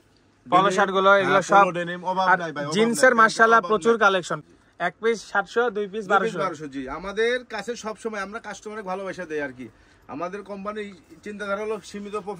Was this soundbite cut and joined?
yes; 1 cut; at 4.3 s

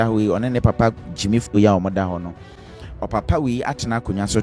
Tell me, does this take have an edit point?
no; 0 cuts

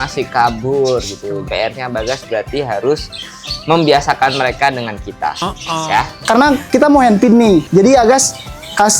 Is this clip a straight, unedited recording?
no; 3 cuts; at 1.4 s, 6.2 s, 7.7 s

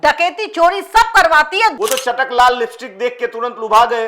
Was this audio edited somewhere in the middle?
yes; 1 cut; at 1.8 s

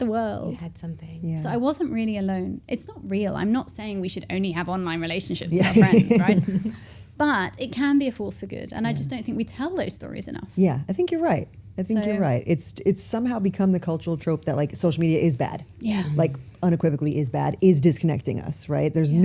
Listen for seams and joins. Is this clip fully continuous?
yes; 0 cuts

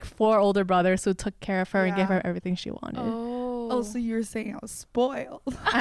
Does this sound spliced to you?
no; 0 cuts

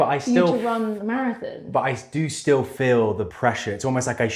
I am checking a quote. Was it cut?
yes; 1 cut; at 3.3 s

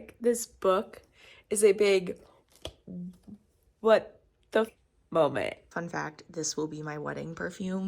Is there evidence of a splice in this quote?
yes; 2 cuts; at 4.7 s, 5.7 s

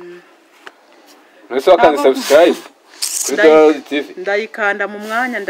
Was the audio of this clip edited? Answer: no; 0 cuts

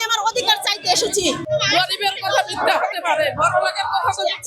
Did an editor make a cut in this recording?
yes; 1 cut; at 1.4 s

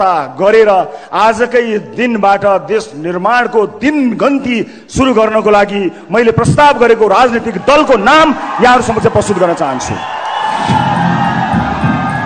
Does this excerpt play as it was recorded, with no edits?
yes; 0 cuts

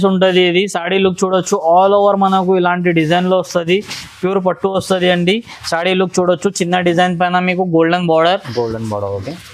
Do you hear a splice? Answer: no; 0 cuts

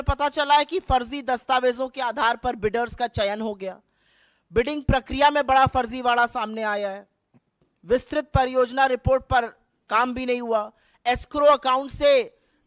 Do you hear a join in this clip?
no; 0 cuts

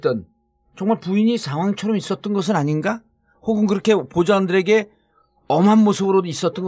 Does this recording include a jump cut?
yes; 1 cut; at 4.4 s

